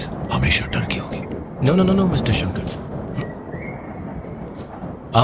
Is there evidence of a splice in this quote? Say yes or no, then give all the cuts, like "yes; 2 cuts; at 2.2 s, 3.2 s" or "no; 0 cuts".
no; 0 cuts